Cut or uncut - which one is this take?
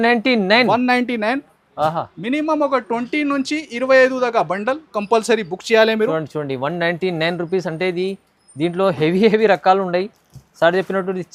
uncut